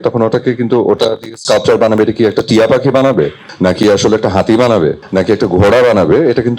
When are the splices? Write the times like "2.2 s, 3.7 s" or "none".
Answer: 5.0 s